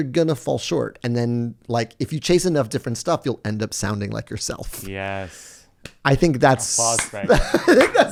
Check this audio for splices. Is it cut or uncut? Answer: uncut